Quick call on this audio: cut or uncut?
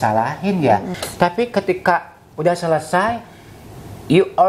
cut